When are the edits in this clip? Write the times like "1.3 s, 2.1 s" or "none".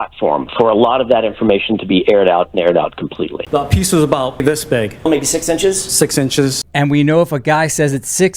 3.4 s, 4.4 s